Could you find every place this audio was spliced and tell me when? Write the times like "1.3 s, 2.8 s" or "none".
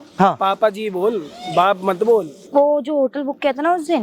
2.4 s